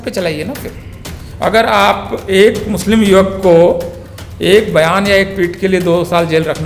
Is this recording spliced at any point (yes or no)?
no